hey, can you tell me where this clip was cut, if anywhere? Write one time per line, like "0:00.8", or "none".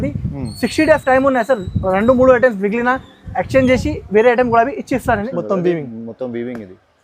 0:05.3